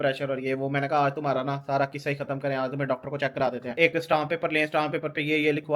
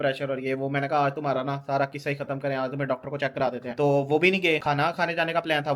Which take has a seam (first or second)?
first